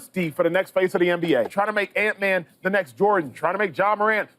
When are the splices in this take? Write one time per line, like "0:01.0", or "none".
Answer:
0:01.5